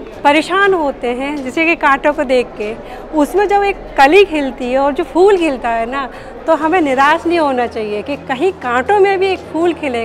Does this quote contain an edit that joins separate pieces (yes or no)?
no